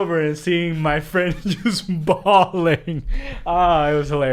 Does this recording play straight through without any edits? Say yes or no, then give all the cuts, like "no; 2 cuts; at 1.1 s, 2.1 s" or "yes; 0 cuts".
yes; 0 cuts